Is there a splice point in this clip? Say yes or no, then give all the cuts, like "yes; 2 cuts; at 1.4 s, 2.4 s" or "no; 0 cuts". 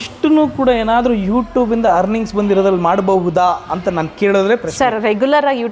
no; 0 cuts